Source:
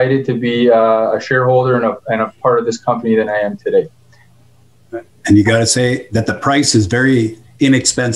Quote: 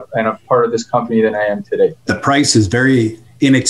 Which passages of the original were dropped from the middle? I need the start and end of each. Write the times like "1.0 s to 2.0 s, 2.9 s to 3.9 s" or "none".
4.0 s to 6.3 s